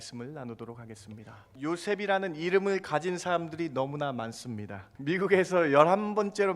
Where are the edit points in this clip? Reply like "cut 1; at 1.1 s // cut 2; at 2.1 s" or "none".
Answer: cut 1; at 1.4 s // cut 2; at 4.9 s